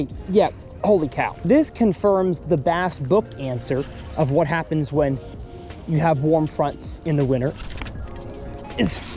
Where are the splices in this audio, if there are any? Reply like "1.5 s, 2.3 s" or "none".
1.3 s